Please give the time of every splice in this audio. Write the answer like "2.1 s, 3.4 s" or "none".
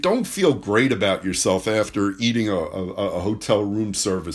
none